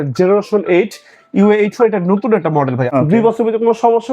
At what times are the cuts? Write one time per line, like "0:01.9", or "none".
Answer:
0:02.8